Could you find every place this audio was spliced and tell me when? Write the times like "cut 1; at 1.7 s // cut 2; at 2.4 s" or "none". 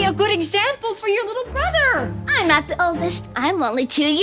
none